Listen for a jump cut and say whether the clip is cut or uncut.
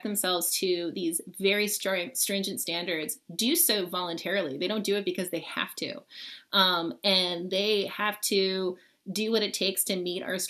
uncut